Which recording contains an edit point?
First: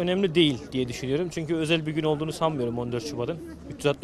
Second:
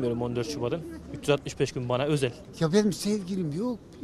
second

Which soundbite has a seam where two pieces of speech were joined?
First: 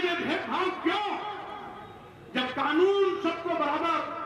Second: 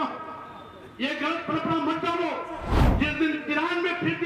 second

